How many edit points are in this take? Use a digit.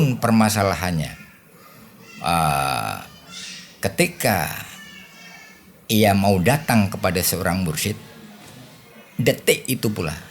0